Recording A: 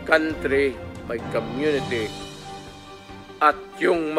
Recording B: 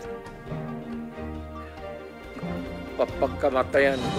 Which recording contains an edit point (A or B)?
B